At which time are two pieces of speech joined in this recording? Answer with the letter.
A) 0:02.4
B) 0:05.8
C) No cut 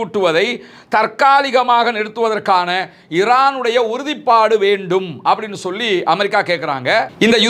C